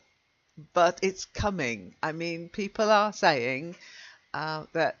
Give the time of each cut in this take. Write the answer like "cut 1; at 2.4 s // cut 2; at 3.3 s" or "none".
none